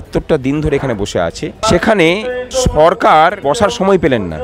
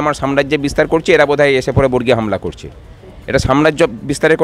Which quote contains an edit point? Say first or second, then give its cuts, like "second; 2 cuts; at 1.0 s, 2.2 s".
first; 3 cuts; at 1.6 s, 2.4 s, 3.4 s